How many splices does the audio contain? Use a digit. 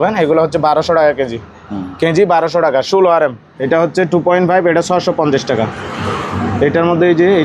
1